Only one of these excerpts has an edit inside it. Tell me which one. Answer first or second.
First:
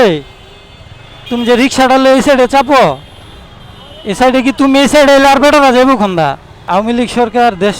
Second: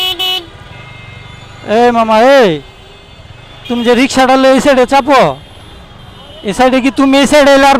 first